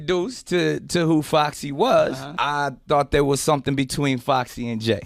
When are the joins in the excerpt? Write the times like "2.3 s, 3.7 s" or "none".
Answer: 2.3 s